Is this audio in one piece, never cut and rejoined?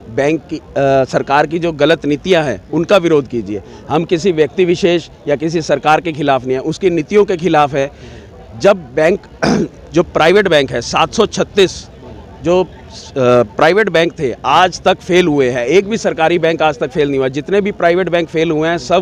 yes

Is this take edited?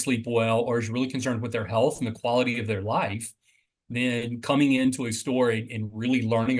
no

